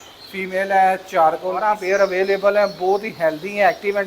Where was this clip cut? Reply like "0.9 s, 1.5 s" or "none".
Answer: 1.7 s